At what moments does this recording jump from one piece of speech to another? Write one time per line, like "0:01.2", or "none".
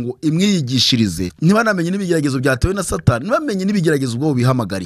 0:01.3